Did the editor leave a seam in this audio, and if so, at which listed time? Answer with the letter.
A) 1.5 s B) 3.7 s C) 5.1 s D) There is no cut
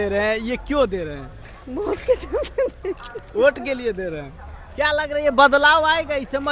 D